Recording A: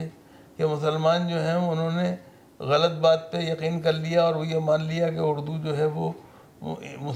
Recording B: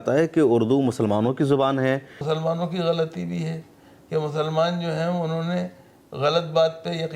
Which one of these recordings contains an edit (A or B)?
B